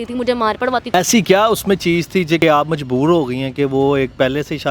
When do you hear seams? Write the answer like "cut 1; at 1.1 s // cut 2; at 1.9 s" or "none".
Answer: cut 1; at 0.9 s // cut 2; at 2.4 s

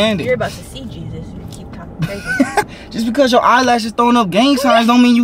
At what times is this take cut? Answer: cut 1; at 2.7 s

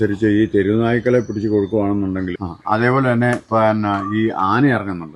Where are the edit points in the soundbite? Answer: cut 1; at 2.3 s

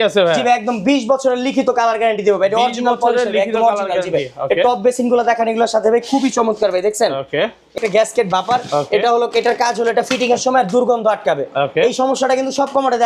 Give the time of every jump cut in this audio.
cut 1; at 7.8 s

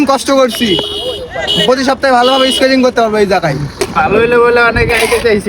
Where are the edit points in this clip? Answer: cut 1; at 3.8 s

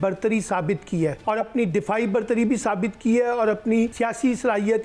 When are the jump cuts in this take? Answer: cut 1; at 1.2 s // cut 2; at 3.9 s

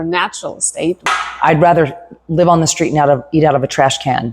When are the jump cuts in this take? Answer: cut 1; at 1.0 s

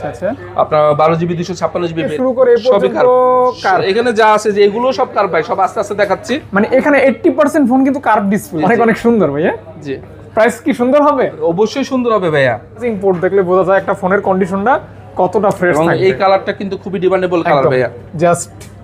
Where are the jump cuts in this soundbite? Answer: cut 1; at 2.1 s // cut 2; at 8.5 s // cut 3; at 12.9 s

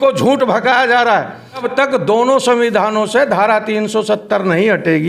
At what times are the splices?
cut 1; at 1.7 s

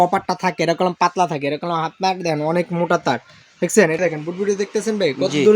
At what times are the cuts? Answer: cut 1; at 4.0 s

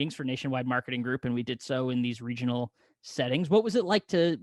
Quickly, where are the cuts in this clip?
none

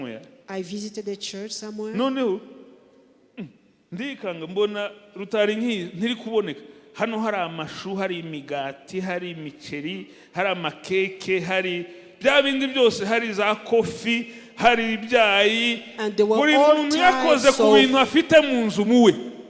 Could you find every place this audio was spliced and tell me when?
none

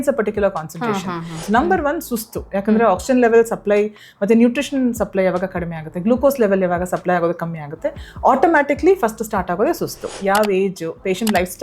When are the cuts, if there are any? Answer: cut 1; at 1.3 s // cut 2; at 10.1 s

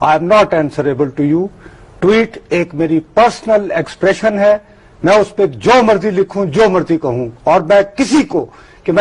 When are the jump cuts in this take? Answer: cut 1; at 2.4 s

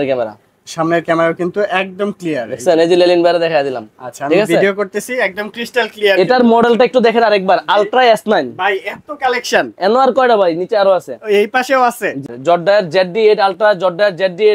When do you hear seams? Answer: cut 1; at 12.3 s

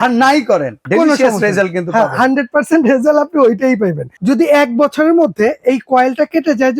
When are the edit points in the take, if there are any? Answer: cut 1; at 4.1 s

